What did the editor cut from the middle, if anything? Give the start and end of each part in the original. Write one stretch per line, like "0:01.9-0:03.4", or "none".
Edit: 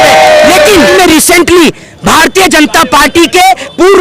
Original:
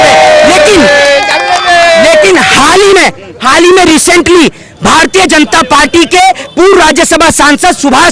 0:00.9-0:03.7